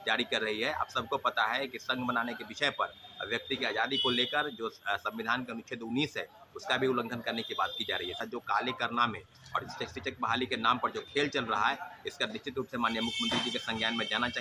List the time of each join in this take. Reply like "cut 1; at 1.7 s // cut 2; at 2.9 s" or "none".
cut 1; at 8.3 s